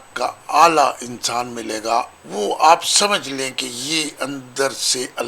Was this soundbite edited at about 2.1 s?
yes; 1 cut; at 2.1 s

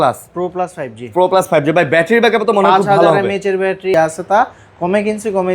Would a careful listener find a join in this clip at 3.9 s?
yes; 1 cut; at 3.9 s

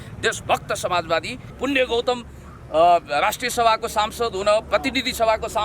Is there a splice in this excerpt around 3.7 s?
no; 1 cut; at 1.5 s

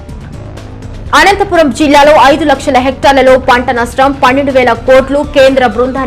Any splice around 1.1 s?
yes; 1 cut; at 1.1 s

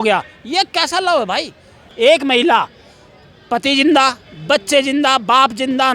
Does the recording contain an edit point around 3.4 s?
no; 1 cut; at 1.9 s

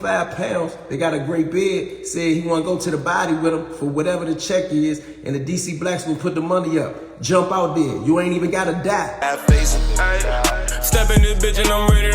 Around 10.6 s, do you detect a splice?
no; 1 cut; at 9.1 s

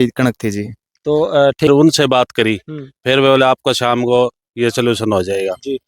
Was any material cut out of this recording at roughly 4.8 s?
no; 1 cut; at 1.7 s

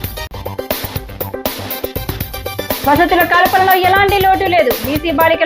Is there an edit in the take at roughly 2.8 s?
yes; 1 cut; at 2.8 s

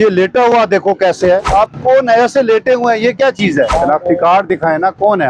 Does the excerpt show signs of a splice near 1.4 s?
yes; 2 cuts; at 1.4 s, 3.7 s

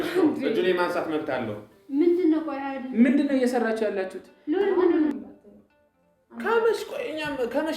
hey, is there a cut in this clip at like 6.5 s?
no; 1 cut; at 5.2 s

